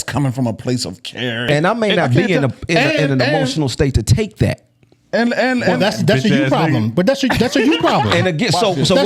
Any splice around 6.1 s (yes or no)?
no